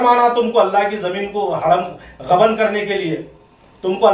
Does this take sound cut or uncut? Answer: uncut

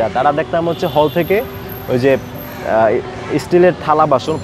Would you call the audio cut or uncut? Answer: uncut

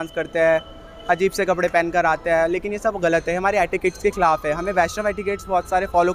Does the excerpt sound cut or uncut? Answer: uncut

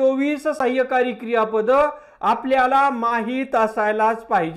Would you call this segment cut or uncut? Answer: uncut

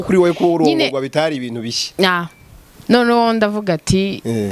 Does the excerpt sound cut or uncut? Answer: uncut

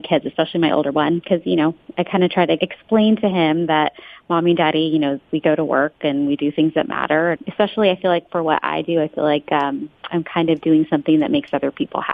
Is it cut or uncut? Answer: cut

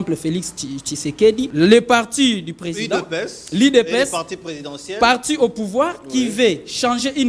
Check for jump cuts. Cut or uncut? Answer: cut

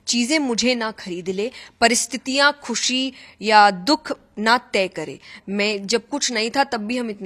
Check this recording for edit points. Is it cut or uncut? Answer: uncut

